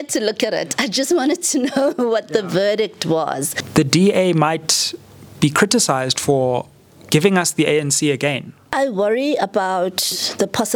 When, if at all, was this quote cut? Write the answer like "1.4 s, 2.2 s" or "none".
3.5 s, 8.6 s